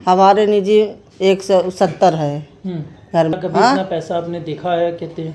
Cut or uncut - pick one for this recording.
cut